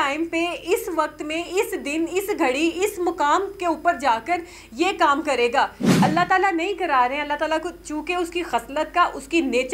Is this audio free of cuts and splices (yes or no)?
no